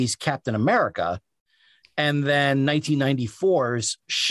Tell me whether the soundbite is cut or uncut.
uncut